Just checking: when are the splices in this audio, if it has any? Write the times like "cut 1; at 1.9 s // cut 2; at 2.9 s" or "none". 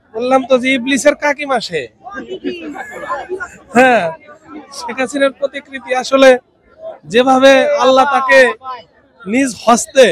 none